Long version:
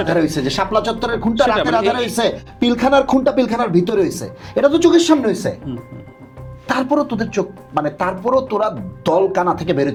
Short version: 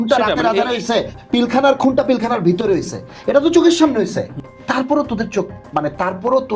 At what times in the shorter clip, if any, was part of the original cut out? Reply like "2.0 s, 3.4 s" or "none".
4.5 s